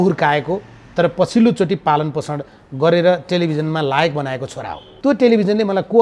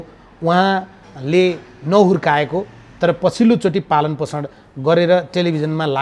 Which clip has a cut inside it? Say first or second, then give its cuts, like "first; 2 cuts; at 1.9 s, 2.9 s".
first; 1 cut; at 5.0 s